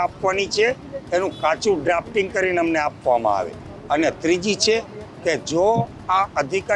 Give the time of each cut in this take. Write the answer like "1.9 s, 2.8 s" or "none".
none